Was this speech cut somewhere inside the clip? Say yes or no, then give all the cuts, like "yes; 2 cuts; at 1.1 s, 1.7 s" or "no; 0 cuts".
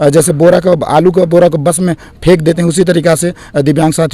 no; 0 cuts